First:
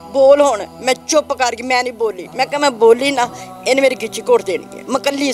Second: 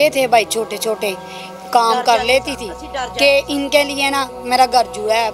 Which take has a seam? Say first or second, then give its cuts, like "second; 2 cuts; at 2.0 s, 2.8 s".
first; 1 cut; at 2.2 s